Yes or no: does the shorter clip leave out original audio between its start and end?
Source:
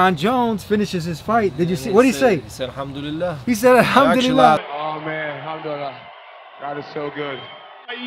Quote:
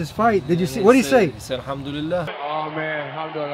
yes